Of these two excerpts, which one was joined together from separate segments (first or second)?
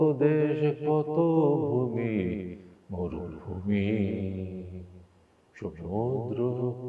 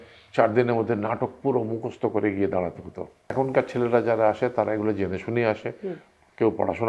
second